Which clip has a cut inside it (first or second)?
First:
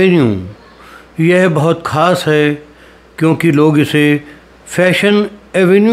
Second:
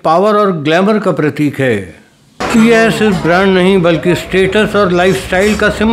second